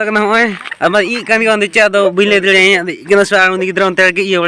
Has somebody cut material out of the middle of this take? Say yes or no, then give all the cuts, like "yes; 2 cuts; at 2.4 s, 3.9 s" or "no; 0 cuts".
no; 0 cuts